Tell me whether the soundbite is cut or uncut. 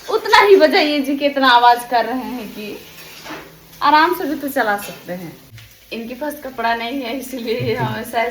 cut